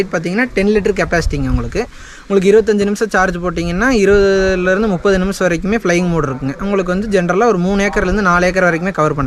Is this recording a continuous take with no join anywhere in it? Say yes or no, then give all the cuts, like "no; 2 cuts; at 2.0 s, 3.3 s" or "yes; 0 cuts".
yes; 0 cuts